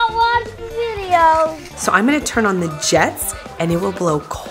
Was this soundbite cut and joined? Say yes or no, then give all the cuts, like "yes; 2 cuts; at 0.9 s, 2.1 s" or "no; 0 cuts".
yes; 1 cut; at 1.7 s